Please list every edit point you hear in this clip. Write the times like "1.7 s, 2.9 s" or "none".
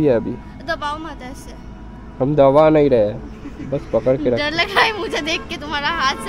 none